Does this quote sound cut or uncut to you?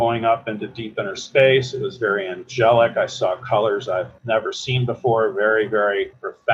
uncut